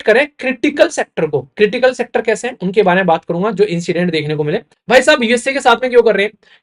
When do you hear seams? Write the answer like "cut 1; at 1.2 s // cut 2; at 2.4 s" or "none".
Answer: cut 1; at 4.7 s